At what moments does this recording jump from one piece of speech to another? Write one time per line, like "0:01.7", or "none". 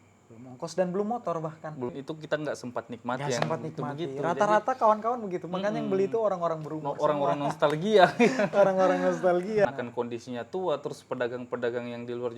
0:01.9
0:09.6